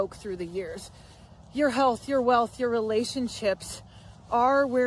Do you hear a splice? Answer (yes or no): no